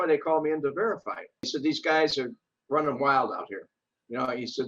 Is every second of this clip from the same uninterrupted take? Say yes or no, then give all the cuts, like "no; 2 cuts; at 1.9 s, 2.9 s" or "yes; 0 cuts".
no; 1 cut; at 1.5 s